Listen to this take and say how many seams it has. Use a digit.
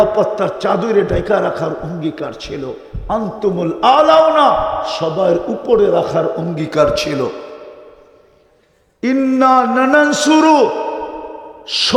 0